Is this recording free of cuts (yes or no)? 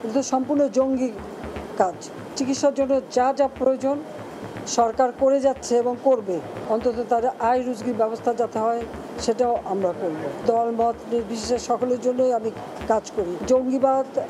no